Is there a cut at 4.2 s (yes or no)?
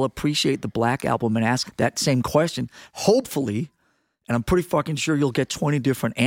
no